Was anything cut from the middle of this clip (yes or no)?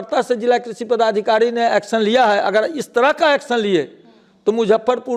no